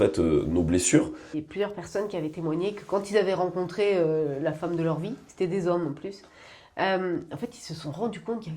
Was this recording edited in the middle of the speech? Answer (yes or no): yes